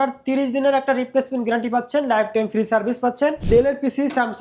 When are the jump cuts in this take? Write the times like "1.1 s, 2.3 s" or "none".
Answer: 3.4 s